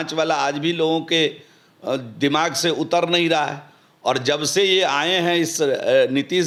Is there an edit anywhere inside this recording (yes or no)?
no